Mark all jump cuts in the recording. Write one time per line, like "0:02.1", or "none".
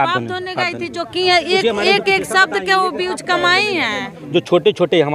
0:04.2